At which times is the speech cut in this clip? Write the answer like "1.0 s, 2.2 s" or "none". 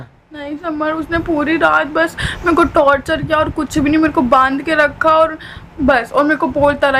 none